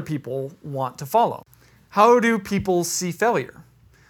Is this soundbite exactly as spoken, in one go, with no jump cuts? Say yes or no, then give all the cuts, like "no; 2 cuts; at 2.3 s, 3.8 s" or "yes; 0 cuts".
no; 1 cut; at 1.5 s